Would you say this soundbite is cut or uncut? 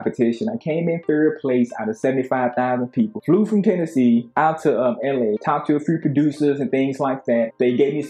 uncut